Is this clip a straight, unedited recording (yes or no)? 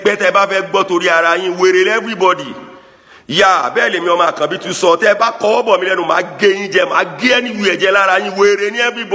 yes